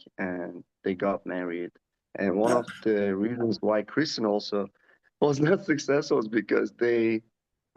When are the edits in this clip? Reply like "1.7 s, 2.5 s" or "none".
none